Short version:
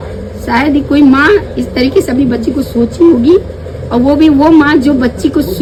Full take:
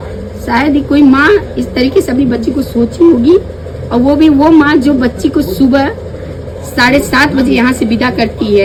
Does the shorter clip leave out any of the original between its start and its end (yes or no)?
no